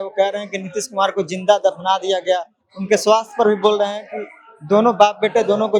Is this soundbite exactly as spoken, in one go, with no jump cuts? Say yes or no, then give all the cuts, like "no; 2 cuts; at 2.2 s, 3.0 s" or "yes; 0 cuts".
yes; 0 cuts